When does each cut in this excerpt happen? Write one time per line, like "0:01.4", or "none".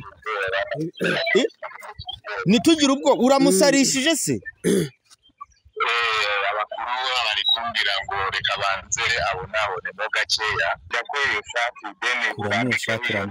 0:10.9